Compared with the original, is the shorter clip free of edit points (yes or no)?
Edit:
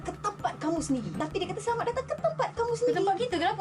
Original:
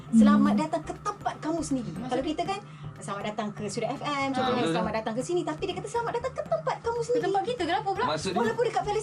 no